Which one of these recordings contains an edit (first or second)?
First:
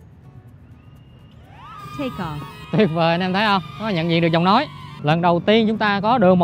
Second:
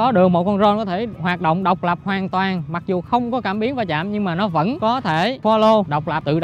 first